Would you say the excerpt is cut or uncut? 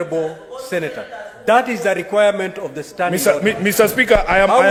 uncut